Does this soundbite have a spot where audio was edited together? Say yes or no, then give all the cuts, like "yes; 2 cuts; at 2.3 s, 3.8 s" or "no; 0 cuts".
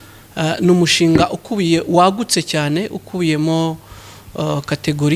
no; 0 cuts